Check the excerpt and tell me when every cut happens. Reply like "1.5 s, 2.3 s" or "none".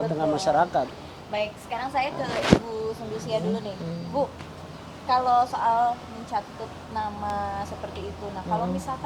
none